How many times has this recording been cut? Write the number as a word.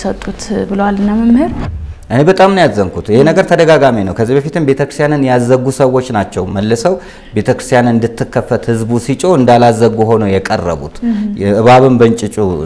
one